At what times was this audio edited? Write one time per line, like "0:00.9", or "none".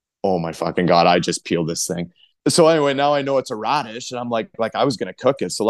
0:02.1